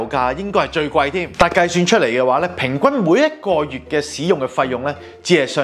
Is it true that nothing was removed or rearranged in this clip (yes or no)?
yes